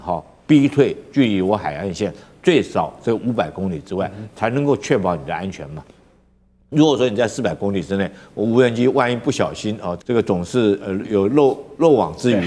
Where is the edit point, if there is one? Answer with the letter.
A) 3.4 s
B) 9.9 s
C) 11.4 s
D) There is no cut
B